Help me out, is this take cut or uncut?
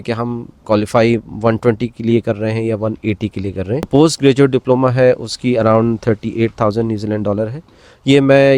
cut